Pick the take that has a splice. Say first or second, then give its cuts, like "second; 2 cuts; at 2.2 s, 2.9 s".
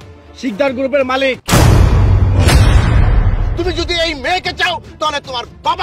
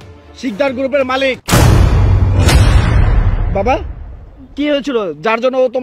first; 1 cut; at 3.4 s